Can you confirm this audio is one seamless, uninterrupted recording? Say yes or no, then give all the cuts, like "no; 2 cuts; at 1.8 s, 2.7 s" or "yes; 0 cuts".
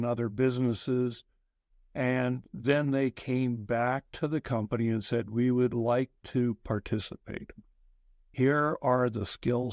yes; 0 cuts